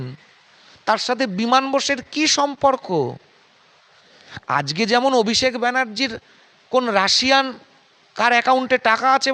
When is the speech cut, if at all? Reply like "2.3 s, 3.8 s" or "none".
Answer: none